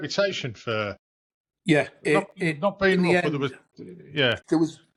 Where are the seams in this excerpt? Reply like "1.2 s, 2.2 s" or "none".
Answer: none